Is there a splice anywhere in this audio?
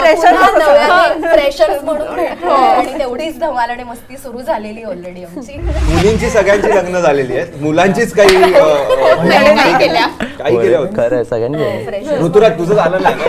yes; 1 cut; at 5.9 s

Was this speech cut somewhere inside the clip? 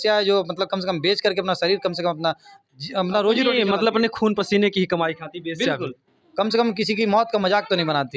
no; 0 cuts

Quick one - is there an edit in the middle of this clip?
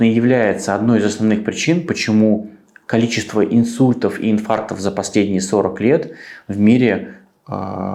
no; 0 cuts

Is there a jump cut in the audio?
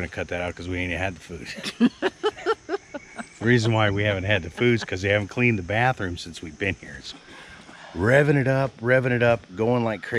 yes; 1 cut; at 7.0 s

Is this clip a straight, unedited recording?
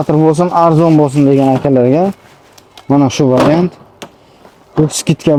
yes; 0 cuts

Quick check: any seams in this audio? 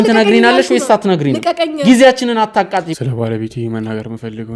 yes; 1 cut; at 2.9 s

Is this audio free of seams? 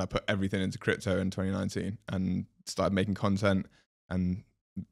yes; 0 cuts

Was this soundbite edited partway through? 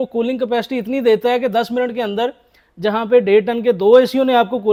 no; 0 cuts

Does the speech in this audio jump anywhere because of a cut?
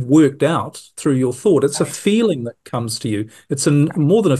yes; 1 cut; at 1.4 s

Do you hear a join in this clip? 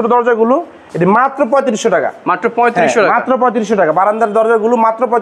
no; 0 cuts

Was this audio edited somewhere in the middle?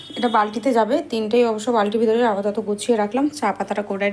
no; 0 cuts

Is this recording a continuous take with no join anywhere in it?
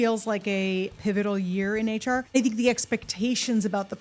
no; 2 cuts; at 0.9 s, 2.4 s

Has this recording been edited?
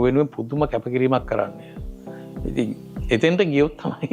no; 0 cuts

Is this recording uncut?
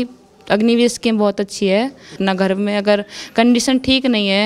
no; 1 cut; at 2.2 s

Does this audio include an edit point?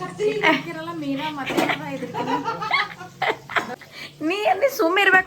yes; 1 cut; at 3.7 s

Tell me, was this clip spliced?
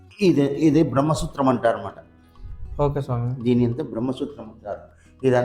no; 0 cuts

